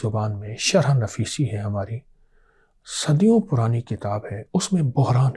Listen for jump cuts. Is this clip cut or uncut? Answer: uncut